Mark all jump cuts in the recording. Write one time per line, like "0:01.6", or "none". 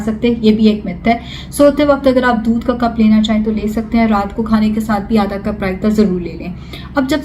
none